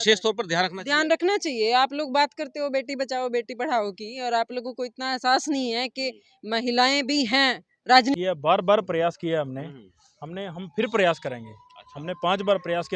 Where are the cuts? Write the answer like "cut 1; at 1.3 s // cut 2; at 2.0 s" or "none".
cut 1; at 8.2 s